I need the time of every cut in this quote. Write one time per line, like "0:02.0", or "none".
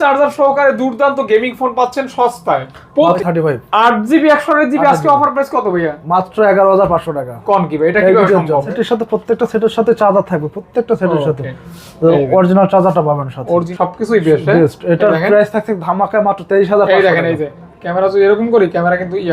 0:03.2
0:08.7
0:13.7

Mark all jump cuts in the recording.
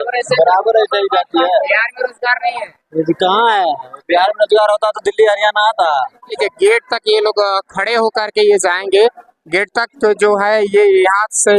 0:06.3

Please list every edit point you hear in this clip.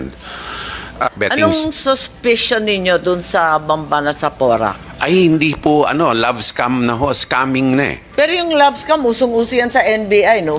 0:01.1

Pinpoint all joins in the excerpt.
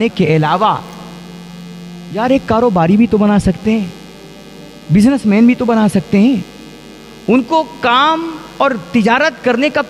none

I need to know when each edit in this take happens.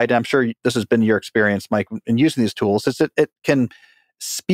none

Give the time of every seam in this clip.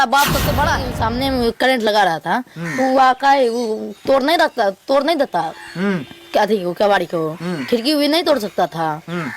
0:00.9

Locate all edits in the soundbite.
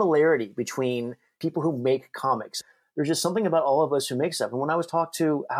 0:01.4
0:02.6

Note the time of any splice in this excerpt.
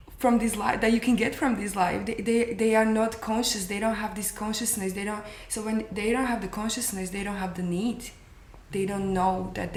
none

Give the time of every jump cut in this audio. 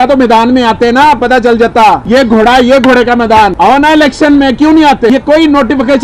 0:02.0
0:03.5
0:05.1

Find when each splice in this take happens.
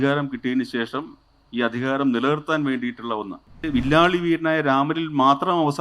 0:03.6

